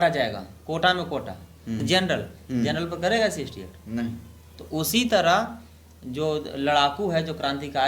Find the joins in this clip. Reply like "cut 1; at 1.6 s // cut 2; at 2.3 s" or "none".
cut 1; at 1.8 s